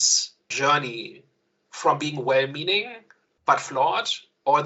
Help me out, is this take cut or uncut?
uncut